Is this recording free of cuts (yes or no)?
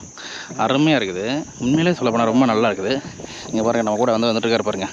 yes